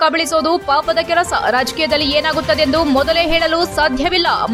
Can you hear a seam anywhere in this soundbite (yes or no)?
no